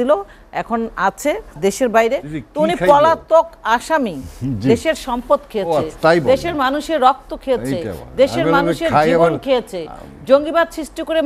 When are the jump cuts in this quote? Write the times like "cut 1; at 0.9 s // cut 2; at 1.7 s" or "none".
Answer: cut 1; at 1.6 s

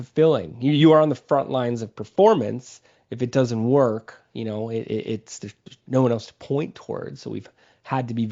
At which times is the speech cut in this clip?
none

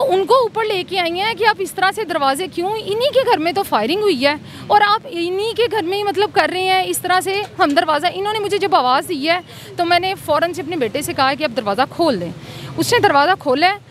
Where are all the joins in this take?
none

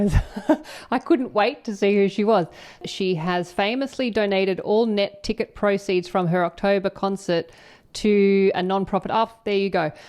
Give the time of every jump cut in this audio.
cut 1; at 2.8 s

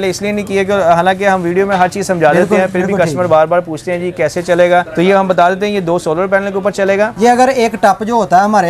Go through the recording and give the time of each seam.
cut 1; at 7.1 s

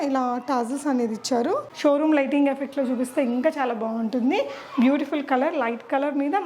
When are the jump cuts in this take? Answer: cut 1; at 1.7 s

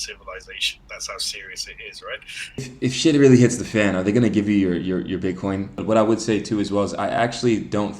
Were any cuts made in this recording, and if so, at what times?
cut 1; at 2.7 s // cut 2; at 5.8 s

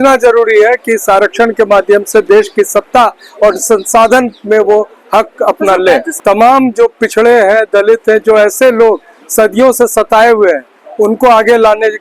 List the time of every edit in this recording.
cut 1; at 6.1 s

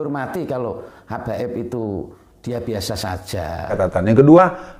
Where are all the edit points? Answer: cut 1; at 3.8 s

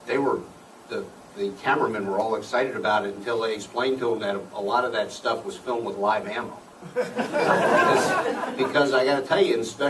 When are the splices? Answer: cut 1; at 5.0 s

